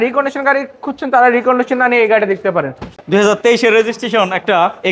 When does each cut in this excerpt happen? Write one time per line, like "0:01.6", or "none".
0:02.8

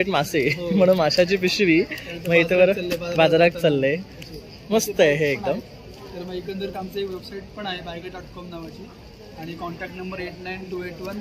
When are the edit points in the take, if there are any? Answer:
none

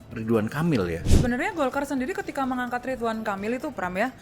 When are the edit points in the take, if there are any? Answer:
0:01.1

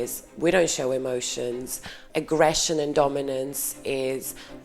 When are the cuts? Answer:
0:02.0

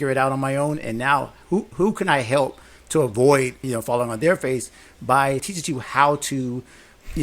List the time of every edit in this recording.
0:03.6
0:05.5

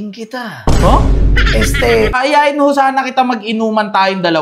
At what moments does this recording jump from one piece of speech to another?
0:02.2

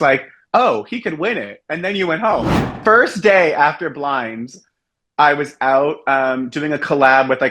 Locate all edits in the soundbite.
0:02.8

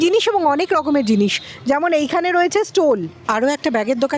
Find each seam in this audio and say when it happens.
0:03.2

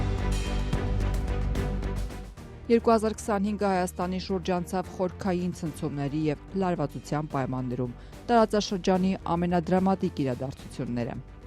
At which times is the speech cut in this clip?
0:02.0

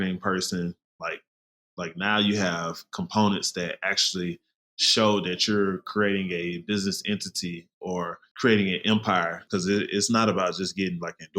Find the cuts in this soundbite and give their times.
0:08.2
0:09.4

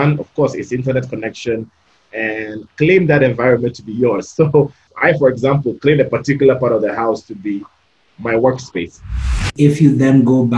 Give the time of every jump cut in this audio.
0:02.6
0:04.8
0:09.5

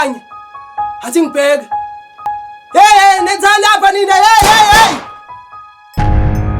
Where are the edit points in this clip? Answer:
0:05.6

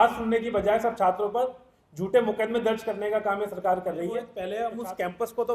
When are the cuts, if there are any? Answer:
0:04.3

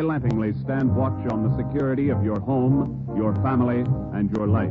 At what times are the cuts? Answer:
0:03.4

